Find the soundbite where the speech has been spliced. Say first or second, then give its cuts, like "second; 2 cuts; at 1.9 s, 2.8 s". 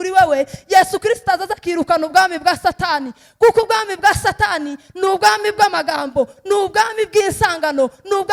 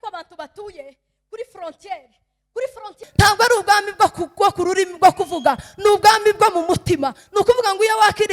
second; 1 cut; at 3.1 s